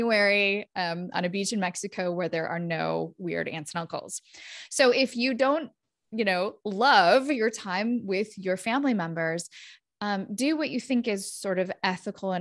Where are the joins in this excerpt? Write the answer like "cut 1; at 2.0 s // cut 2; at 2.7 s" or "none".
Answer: none